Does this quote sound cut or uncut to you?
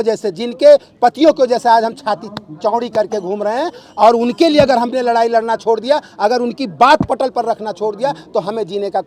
uncut